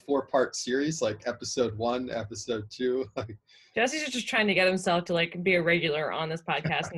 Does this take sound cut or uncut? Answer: uncut